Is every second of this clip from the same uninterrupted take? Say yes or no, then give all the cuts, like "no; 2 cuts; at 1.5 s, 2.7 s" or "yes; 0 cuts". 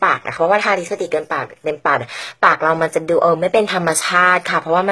yes; 0 cuts